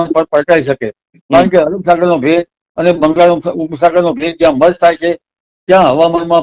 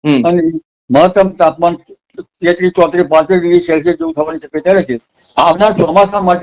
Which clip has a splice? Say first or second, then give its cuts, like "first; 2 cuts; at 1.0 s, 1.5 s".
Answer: second; 1 cut; at 5.1 s